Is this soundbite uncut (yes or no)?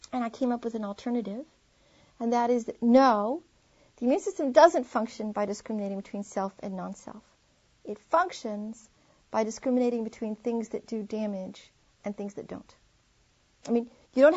yes